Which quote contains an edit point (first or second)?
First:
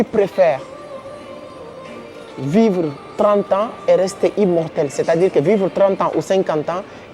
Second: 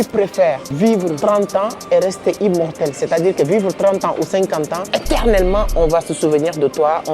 second